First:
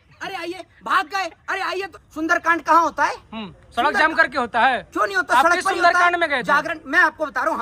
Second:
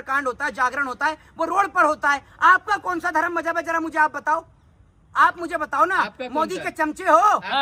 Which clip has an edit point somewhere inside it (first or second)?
first